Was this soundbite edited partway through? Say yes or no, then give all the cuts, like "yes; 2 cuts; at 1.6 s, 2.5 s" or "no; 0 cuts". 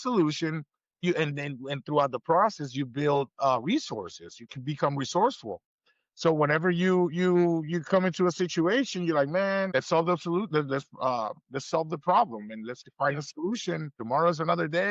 yes; 3 cuts; at 1.0 s, 9.7 s, 13.9 s